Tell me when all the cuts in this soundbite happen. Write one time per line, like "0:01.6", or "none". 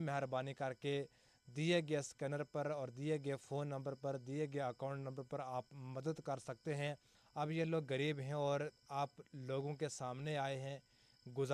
0:07.1